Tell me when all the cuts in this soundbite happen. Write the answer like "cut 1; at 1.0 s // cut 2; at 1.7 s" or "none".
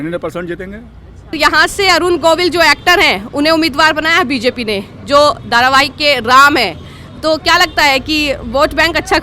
cut 1; at 1.3 s